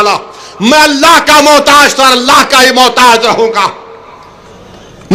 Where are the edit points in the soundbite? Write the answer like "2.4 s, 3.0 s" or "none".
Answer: none

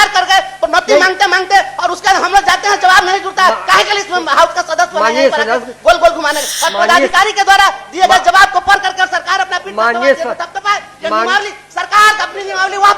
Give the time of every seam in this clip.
none

